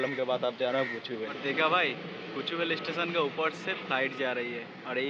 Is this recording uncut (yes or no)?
no